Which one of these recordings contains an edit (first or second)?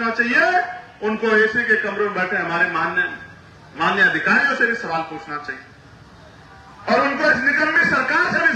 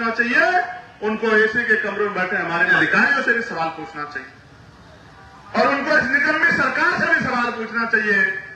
second